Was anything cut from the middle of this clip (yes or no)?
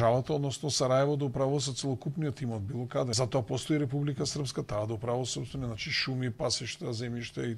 yes